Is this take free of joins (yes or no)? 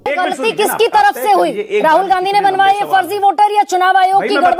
yes